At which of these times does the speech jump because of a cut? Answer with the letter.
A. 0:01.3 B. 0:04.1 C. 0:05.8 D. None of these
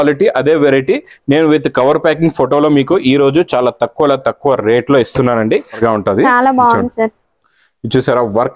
C